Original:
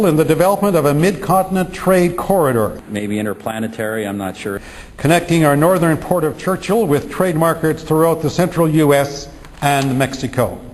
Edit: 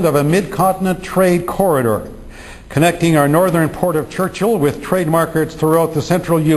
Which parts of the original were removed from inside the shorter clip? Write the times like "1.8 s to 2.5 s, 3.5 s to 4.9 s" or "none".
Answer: 2.9 s to 4.5 s